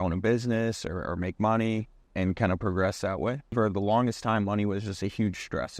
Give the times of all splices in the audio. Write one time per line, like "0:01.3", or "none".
0:02.0
0:03.5